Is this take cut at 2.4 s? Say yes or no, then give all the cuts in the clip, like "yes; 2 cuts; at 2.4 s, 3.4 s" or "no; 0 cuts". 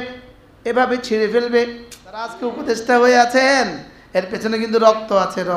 yes; 1 cut; at 2.4 s